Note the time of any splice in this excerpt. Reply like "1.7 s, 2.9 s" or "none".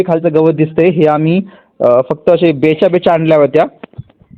none